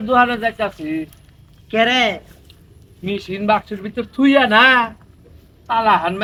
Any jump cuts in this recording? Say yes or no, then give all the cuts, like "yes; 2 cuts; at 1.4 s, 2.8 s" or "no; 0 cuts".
no; 0 cuts